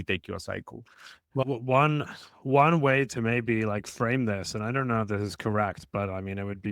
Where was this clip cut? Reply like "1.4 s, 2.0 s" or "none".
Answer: 1.4 s